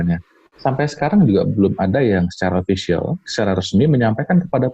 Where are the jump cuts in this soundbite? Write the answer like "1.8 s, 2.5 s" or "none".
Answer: none